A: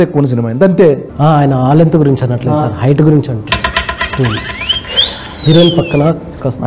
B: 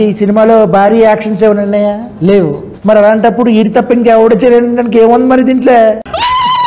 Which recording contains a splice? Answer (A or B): B